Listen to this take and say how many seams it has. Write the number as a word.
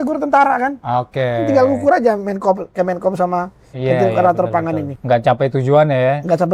one